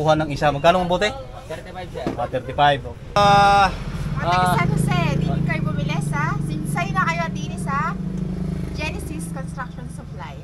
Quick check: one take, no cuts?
no; 1 cut; at 3.1 s

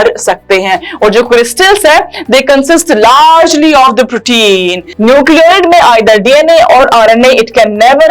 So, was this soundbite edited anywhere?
yes; 1 cut; at 4.8 s

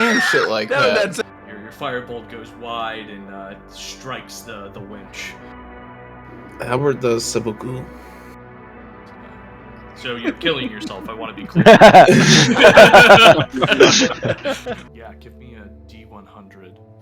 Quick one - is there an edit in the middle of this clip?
yes; 2 cuts; at 1.2 s, 14.8 s

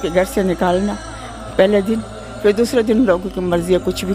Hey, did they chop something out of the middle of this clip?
no; 0 cuts

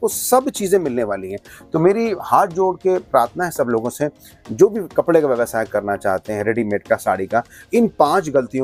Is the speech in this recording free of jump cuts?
yes; 0 cuts

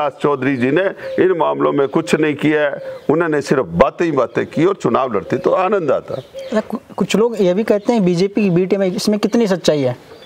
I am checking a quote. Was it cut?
no; 0 cuts

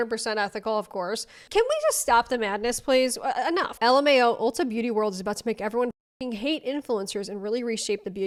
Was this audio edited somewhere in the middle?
no; 0 cuts

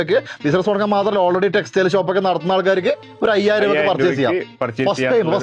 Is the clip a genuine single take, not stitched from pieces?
yes; 0 cuts

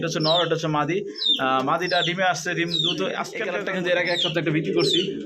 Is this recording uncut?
no; 1 cut; at 3.5 s

